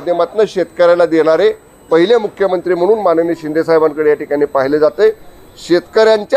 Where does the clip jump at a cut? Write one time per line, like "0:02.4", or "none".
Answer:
none